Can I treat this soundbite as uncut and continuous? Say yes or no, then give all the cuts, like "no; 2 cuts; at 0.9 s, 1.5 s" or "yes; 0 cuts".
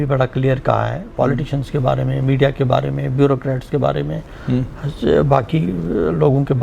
yes; 0 cuts